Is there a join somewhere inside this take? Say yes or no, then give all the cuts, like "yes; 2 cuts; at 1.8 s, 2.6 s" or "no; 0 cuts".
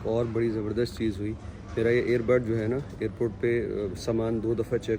no; 0 cuts